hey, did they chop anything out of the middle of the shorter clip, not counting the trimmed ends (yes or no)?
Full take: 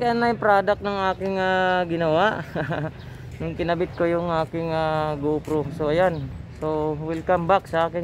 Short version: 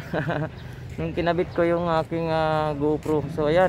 no